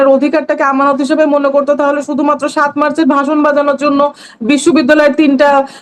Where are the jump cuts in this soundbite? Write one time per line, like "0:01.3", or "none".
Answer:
none